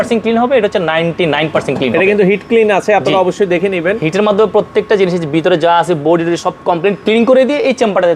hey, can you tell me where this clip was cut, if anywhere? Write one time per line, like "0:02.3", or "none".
none